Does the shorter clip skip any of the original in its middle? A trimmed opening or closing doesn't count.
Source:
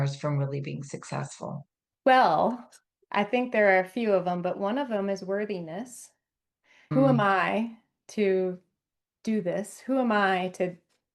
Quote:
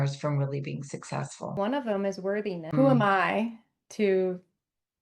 yes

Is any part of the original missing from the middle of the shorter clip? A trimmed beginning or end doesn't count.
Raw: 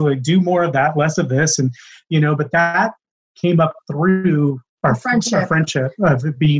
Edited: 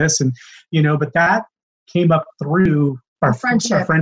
yes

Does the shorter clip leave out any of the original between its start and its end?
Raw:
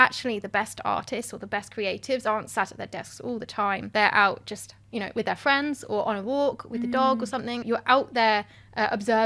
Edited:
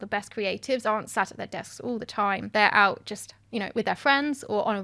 no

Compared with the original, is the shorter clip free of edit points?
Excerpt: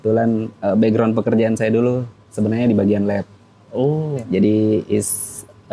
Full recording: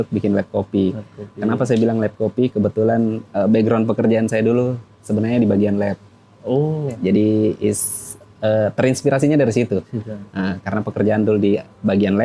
yes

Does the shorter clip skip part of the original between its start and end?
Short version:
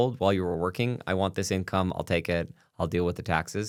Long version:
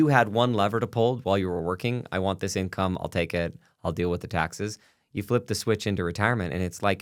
no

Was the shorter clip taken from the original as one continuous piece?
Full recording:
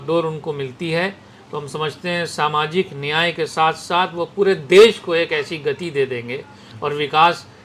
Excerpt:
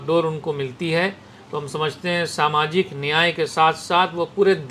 yes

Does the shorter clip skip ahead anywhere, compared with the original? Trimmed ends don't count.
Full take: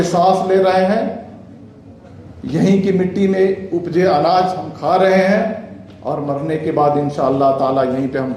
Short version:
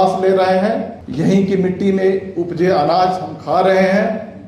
yes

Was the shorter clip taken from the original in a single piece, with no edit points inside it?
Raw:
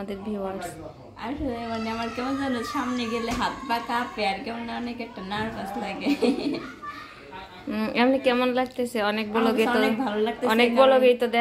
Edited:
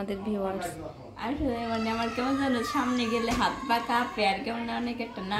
yes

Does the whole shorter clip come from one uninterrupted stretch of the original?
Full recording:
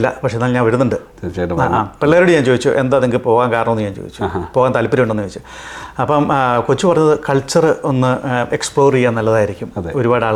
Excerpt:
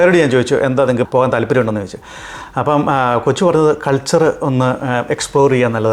no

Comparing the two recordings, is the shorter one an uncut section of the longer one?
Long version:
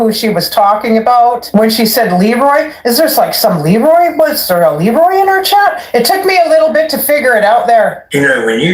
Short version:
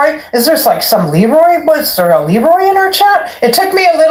yes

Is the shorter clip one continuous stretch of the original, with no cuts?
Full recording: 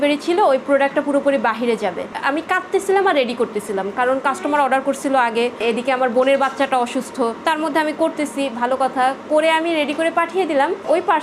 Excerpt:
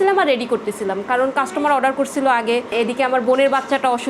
yes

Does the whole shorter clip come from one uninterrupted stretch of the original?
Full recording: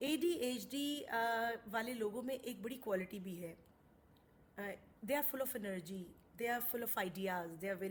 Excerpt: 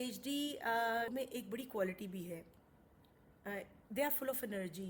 no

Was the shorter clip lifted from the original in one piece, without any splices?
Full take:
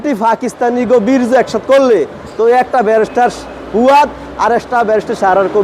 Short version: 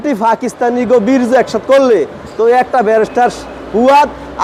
yes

